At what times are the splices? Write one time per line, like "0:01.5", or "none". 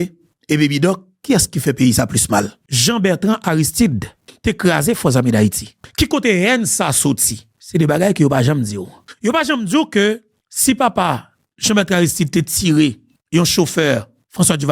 0:02.6

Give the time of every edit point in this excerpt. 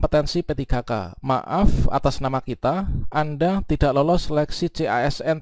none

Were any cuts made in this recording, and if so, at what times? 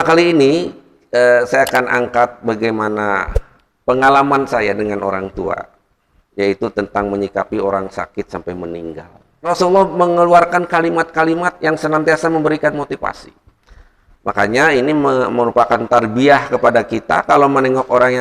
0:09.5

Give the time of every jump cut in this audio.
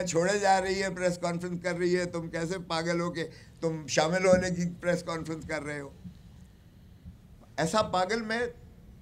none

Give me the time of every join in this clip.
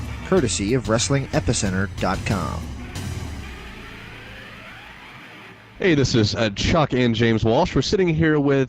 0:05.6

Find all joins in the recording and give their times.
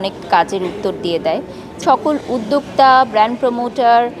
0:01.7

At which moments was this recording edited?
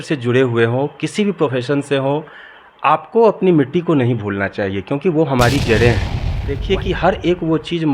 0:06.5

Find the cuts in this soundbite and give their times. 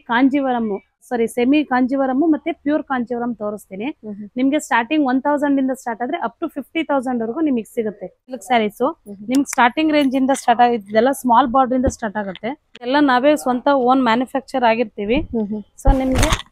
0:01.1
0:08.4
0:12.9

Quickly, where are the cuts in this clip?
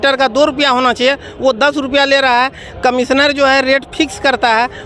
none

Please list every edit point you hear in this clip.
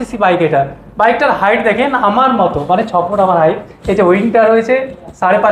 none

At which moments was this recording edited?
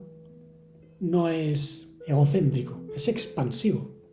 0:02.9

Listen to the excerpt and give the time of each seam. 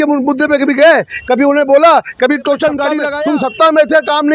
0:03.1

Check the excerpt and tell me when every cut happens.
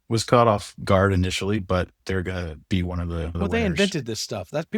0:03.4

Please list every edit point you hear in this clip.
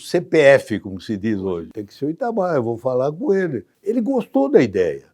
0:01.7
0:03.7

